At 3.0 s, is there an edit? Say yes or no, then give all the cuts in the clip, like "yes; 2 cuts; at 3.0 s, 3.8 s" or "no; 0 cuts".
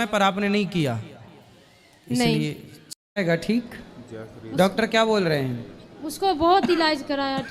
yes; 1 cut; at 3.0 s